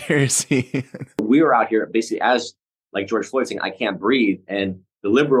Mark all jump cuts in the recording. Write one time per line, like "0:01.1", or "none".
0:01.2